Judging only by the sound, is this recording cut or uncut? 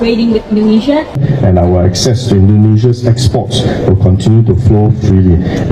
cut